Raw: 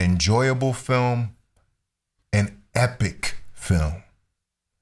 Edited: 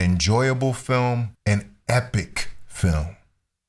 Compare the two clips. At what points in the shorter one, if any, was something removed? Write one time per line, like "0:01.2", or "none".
0:01.3